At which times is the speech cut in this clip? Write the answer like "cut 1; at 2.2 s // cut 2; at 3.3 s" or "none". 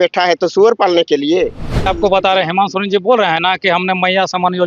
cut 1; at 1.9 s